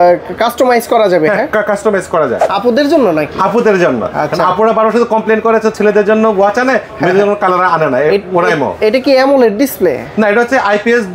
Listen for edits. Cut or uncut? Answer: cut